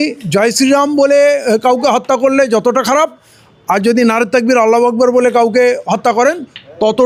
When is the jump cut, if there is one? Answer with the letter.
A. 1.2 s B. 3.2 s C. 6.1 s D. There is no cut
D